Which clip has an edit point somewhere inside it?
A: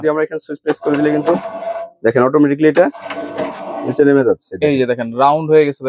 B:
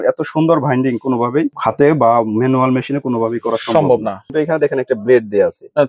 B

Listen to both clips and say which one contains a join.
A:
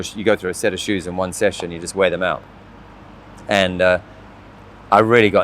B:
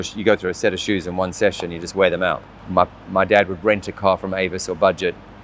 B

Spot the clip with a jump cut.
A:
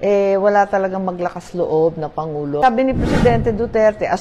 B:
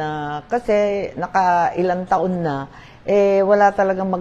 A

